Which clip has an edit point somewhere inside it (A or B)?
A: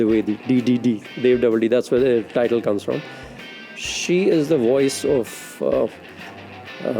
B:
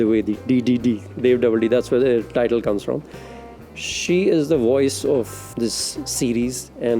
B